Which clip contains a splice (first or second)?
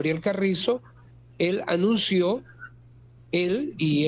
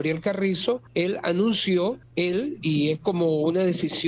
second